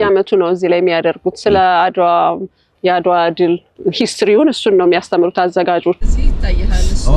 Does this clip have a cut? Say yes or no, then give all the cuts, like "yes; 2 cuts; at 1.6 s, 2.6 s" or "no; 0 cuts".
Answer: yes; 3 cuts; at 2.7 s, 3.7 s, 6.0 s